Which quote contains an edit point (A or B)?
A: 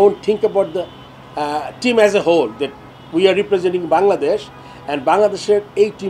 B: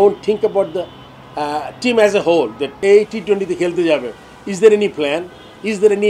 B